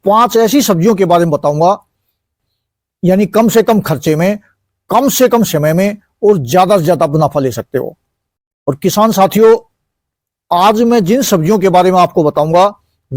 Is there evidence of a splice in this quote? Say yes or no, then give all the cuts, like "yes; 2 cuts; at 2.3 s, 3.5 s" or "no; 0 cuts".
no; 0 cuts